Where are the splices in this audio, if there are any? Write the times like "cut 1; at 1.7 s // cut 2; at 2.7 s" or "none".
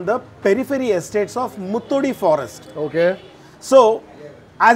none